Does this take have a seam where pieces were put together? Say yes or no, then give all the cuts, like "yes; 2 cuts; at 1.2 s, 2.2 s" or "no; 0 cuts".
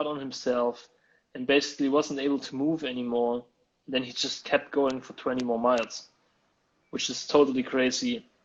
no; 0 cuts